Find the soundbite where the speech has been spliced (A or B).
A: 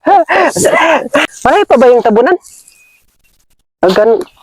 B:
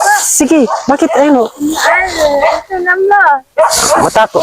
A